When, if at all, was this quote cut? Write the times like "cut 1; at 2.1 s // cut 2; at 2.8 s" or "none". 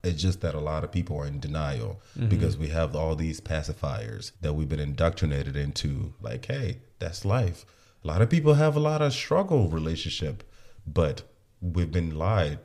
cut 1; at 4.2 s // cut 2; at 6.1 s

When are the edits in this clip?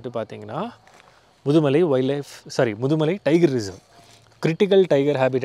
none

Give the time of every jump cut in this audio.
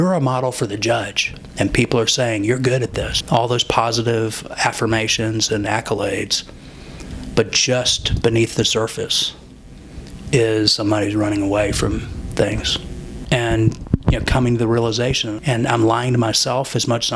cut 1; at 1.4 s // cut 2; at 13.2 s // cut 3; at 15.3 s

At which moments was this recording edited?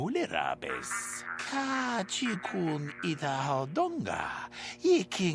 cut 1; at 1.4 s

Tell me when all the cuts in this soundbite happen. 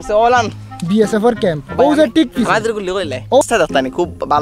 cut 1; at 3.4 s

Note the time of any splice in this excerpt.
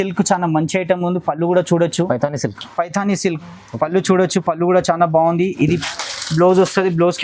none

